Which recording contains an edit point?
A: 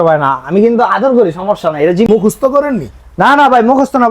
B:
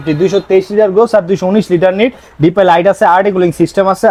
A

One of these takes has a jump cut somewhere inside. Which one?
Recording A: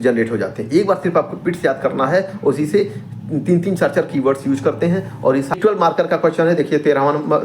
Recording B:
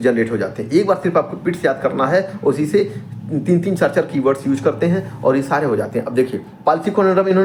A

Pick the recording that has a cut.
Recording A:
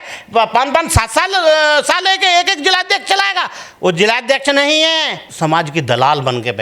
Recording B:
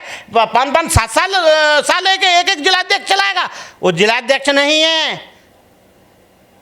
A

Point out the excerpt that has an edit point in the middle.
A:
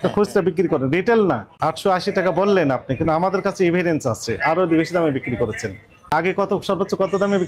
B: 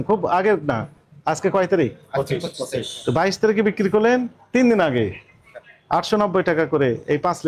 A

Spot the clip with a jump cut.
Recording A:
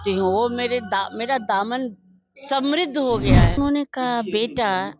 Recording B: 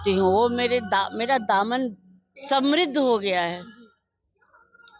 A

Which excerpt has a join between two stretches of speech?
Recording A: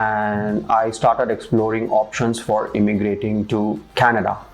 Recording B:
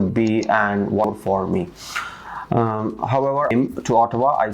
B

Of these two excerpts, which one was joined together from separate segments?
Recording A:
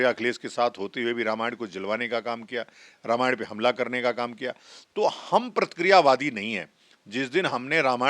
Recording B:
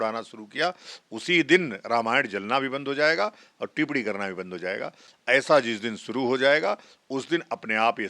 B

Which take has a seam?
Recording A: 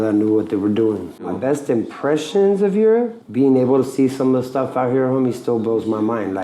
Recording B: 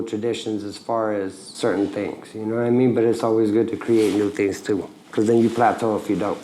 A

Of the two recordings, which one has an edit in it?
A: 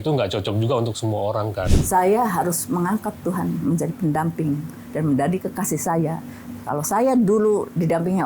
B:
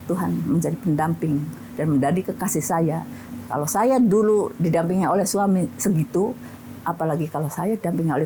A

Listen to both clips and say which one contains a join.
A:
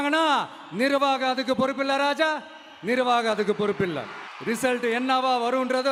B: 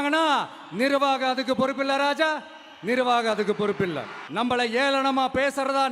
B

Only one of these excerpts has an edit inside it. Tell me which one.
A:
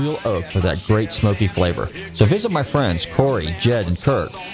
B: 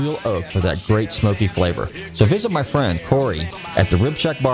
B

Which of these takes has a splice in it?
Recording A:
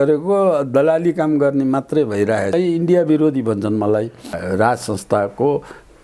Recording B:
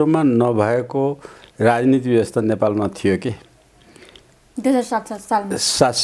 A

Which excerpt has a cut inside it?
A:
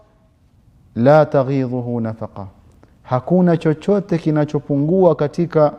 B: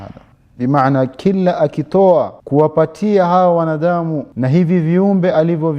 B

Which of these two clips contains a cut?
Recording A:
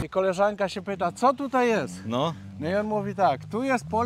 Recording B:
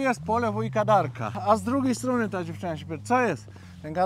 B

